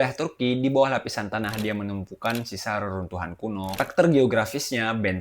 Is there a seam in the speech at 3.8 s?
yes; 1 cut; at 3.8 s

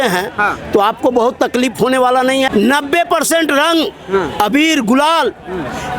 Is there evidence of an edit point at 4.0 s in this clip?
no; 1 cut; at 2.5 s

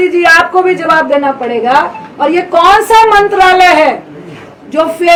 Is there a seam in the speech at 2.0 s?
no; 0 cuts

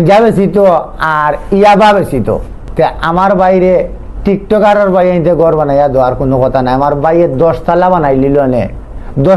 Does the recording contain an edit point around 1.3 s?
no; 1 cut; at 2.6 s

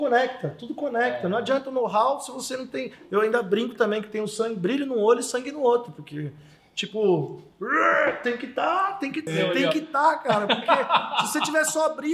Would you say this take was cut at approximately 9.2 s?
yes; 1 cut; at 9.2 s

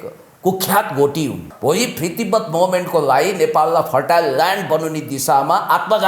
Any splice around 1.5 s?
yes; 1 cut; at 1.5 s

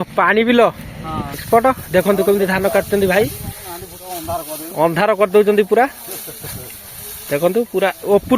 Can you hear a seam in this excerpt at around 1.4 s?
yes; 1 cut; at 1.4 s

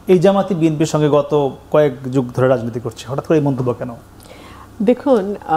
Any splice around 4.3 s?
no; 0 cuts

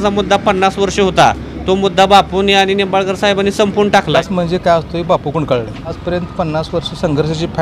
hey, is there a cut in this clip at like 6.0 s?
yes; 2 cuts; at 4.2 s, 6.0 s

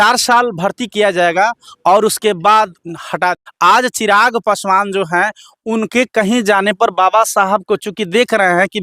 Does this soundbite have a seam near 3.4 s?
yes; 1 cut; at 3.4 s

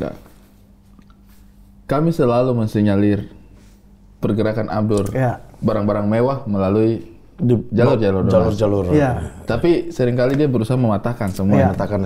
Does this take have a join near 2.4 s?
no; 0 cuts

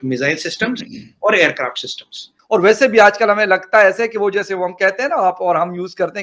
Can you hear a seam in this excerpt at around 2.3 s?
yes; 1 cut; at 2.3 s

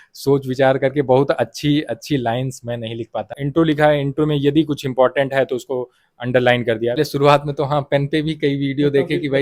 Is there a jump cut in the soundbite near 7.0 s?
yes; 2 cuts; at 3.4 s, 7.0 s

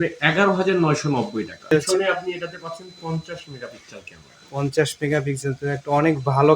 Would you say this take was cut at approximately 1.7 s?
yes; 1 cut; at 1.7 s

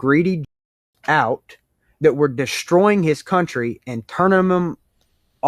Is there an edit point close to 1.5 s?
no; 0 cuts

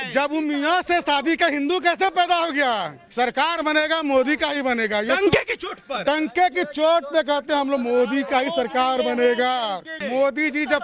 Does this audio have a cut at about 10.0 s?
yes; 2 cuts; at 3.0 s, 10.0 s

